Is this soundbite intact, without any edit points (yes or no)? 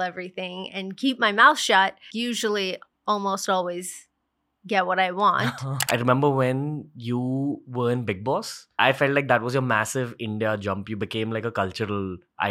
no